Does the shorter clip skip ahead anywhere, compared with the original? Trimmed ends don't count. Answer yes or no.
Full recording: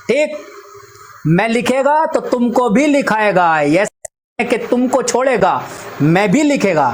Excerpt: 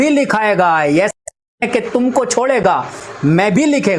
no